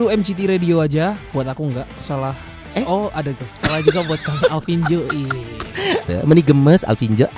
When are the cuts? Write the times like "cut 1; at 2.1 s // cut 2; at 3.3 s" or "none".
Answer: cut 1; at 6.1 s